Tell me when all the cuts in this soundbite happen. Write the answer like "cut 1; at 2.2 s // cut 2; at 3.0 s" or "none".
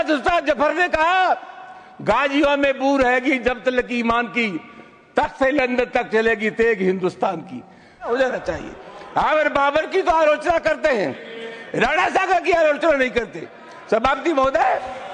cut 1; at 8.1 s